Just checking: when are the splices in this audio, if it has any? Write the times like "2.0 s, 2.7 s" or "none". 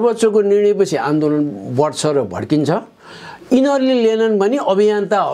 none